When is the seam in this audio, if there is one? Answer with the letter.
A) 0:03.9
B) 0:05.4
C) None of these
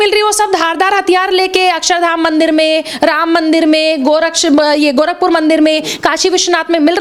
C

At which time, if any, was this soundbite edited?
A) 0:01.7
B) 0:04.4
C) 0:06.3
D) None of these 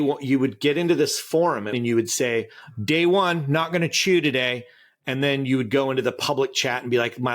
A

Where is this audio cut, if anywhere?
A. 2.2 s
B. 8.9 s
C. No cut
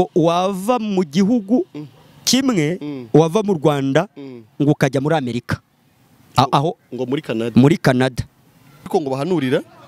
B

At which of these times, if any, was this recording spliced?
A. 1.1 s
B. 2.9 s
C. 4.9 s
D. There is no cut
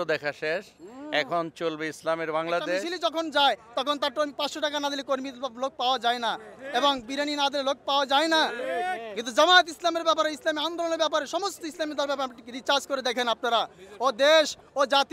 B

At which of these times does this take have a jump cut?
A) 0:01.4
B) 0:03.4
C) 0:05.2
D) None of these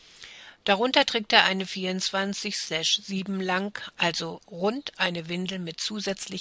D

